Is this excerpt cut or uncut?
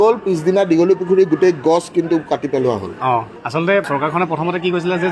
cut